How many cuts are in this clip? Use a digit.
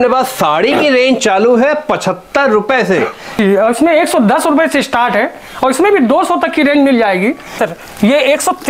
2